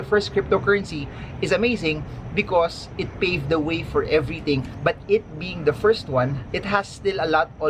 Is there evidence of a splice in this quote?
no; 0 cuts

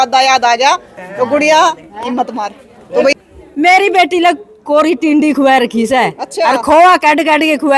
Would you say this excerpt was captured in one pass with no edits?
no; 1 cut; at 3.2 s

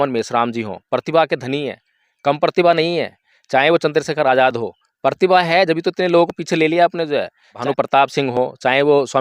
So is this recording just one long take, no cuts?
no; 1 cut; at 7.6 s

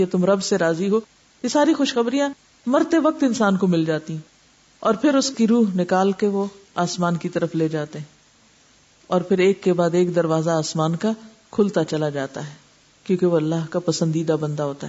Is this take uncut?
yes; 0 cuts

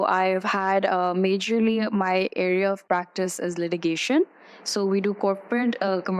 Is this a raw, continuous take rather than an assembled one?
yes; 0 cuts

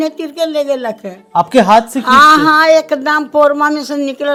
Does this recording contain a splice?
no; 0 cuts

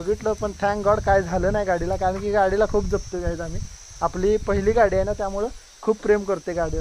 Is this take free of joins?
yes; 0 cuts

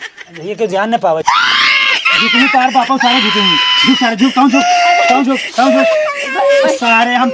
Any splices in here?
yes; 1 cut; at 1.2 s

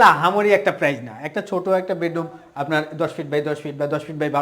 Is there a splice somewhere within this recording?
no; 0 cuts

